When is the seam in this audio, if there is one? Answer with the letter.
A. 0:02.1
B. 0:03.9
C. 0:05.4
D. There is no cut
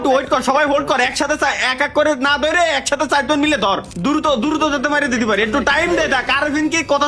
B